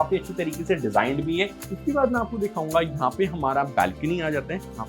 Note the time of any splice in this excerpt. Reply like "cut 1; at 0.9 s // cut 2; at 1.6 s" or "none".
cut 1; at 1.6 s